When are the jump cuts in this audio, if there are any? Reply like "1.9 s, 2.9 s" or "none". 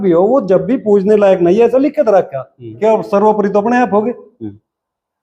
2.7 s